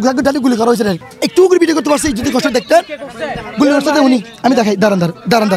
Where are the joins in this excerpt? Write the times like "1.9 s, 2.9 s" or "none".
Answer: 1.1 s